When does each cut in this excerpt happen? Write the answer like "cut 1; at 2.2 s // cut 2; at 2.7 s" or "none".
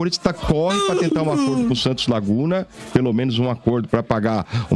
cut 1; at 1.1 s

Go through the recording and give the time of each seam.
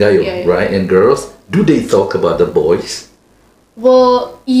none

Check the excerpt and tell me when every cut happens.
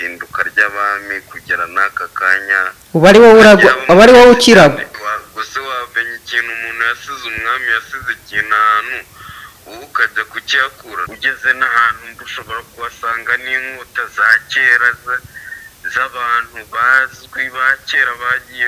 cut 1; at 5.0 s // cut 2; at 11.1 s

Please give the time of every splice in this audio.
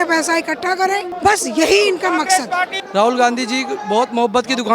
cut 1; at 1.1 s // cut 2; at 2.8 s

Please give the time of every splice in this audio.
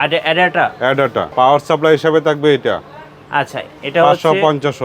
cut 1; at 1.3 s

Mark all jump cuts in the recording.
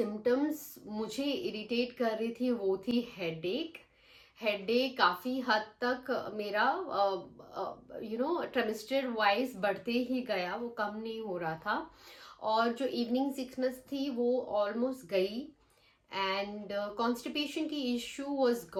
none

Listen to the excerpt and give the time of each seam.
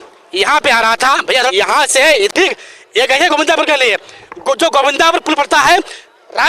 cut 1; at 2.3 s

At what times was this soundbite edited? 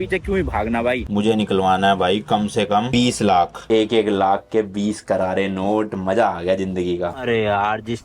cut 1; at 1.0 s // cut 2; at 2.9 s // cut 3; at 3.6 s // cut 4; at 7.2 s

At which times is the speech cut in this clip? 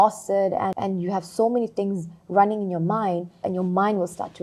cut 1; at 0.8 s // cut 2; at 3.4 s

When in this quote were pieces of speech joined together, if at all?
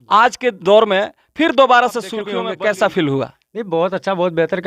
cut 1; at 2.3 s

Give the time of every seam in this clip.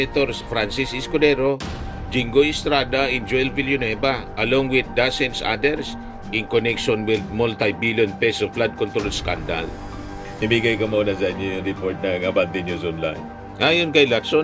cut 1; at 10.3 s

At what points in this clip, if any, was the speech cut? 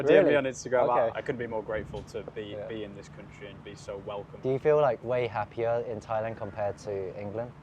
cut 1; at 1.1 s // cut 2; at 4.3 s

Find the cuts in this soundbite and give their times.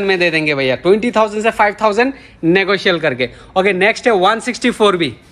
none

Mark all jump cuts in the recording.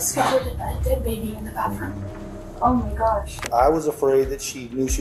cut 1; at 3.4 s

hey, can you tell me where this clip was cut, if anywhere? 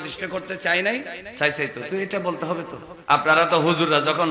cut 1; at 1.2 s // cut 2; at 2.9 s

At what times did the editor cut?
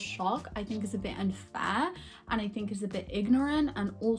none

